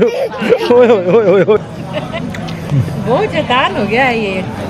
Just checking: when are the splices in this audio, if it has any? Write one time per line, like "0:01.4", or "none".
0:01.6